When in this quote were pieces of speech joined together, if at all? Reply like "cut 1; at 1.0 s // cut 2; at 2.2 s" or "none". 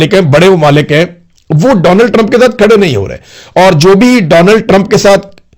none